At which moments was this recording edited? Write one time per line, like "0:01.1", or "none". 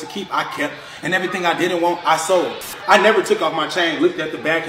0:02.7